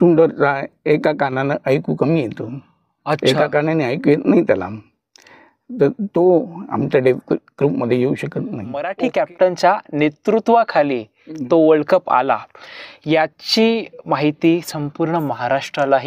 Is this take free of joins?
no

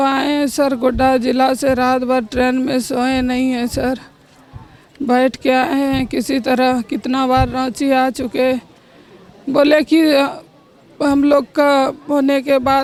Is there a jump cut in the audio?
no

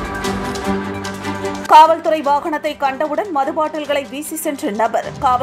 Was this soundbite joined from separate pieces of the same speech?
yes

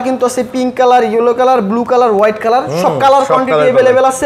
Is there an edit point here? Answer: no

